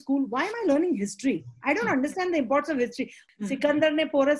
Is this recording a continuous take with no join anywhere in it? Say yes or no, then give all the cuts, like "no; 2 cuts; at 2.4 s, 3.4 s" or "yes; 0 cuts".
no; 1 cut; at 3.2 s